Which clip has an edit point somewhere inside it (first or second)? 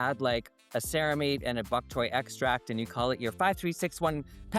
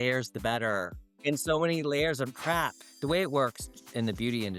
second